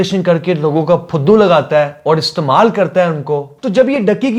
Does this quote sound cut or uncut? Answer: uncut